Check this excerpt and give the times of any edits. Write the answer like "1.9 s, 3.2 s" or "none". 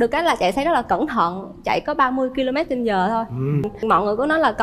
3.7 s